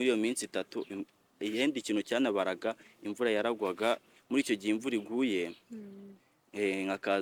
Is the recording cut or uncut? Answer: uncut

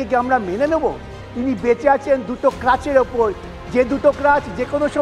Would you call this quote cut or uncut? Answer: cut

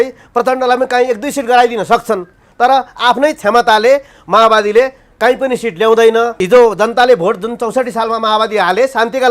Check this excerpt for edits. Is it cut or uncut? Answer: cut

